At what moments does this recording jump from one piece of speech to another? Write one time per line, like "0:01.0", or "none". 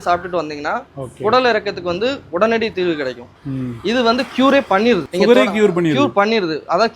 0:03.3